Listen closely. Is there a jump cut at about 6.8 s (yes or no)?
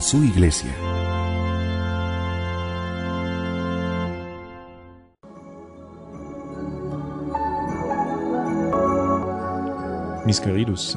yes